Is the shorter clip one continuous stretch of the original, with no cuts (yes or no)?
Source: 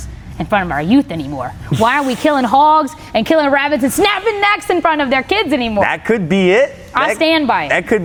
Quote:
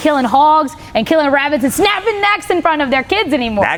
yes